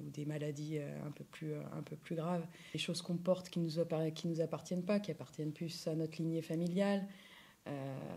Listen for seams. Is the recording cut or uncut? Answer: cut